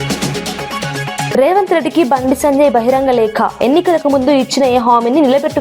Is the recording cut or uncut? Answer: cut